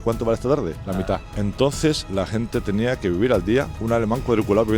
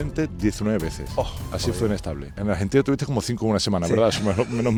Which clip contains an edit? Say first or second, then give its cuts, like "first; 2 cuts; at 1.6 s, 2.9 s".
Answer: first; 3 cuts; at 1.0 s, 2.0 s, 3.8 s